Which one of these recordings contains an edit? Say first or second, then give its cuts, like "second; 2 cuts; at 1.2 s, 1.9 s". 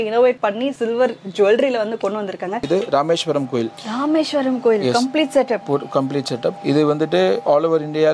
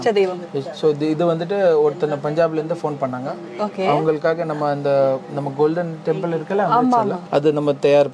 first; 1 cut; at 2.6 s